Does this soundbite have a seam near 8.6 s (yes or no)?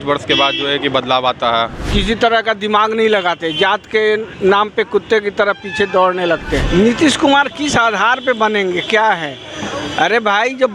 no